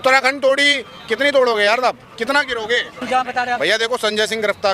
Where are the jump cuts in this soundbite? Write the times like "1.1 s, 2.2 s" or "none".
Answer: 3.0 s